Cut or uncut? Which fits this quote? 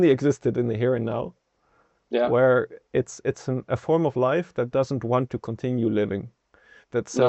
uncut